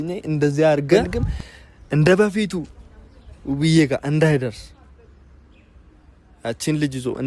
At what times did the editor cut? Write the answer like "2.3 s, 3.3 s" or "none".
1.1 s

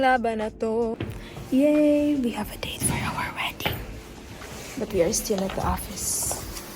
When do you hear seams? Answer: 0.9 s

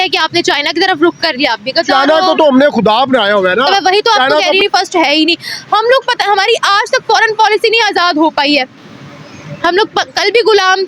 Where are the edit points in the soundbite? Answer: 4.6 s

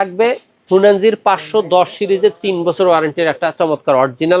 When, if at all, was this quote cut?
none

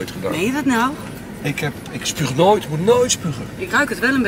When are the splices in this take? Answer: none

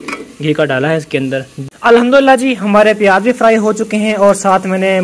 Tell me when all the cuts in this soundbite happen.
1.5 s

